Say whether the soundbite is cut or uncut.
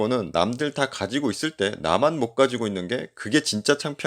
uncut